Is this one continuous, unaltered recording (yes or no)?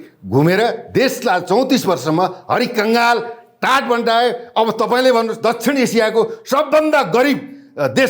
yes